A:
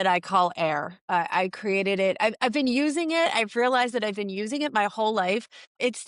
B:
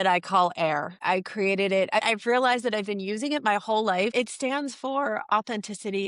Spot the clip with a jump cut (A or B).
B